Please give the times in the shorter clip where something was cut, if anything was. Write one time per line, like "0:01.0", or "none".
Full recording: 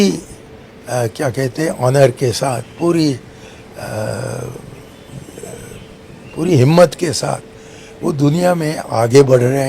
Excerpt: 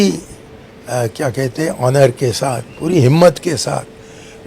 0:02.7